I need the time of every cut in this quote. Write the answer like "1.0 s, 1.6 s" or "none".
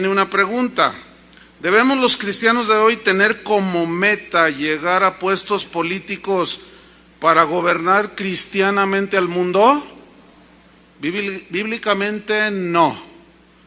1.8 s